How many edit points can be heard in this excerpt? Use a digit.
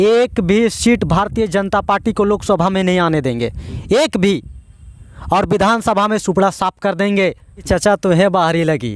1